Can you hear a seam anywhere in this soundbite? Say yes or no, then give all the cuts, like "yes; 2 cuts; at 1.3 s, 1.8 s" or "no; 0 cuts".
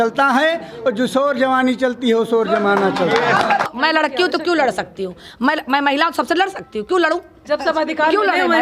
yes; 1 cut; at 3.7 s